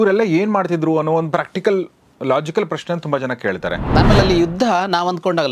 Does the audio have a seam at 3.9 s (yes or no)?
yes